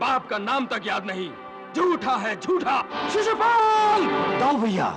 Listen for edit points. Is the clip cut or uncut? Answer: cut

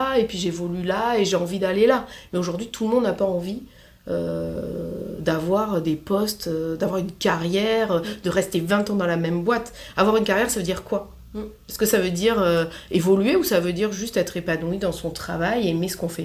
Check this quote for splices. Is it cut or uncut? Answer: uncut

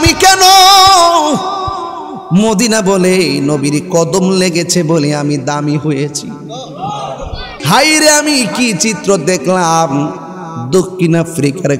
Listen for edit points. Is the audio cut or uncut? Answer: cut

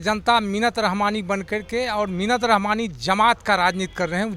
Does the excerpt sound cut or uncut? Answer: uncut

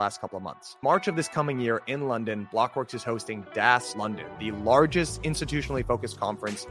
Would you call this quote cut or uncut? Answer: cut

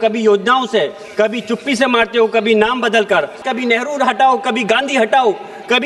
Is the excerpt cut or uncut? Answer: cut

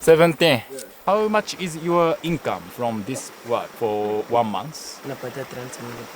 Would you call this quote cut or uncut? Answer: cut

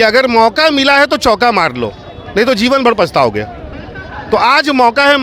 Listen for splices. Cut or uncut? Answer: uncut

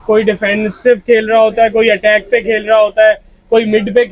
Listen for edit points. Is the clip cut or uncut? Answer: uncut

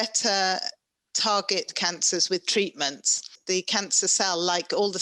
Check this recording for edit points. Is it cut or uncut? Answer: cut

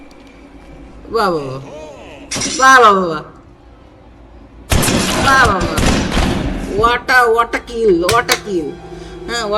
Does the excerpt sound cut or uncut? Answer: uncut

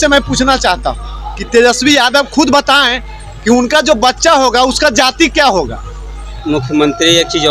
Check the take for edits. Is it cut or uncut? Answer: cut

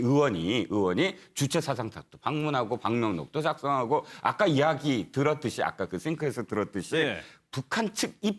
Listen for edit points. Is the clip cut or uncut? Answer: cut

